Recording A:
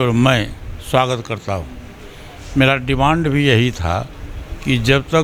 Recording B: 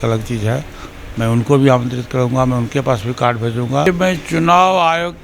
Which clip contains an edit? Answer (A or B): B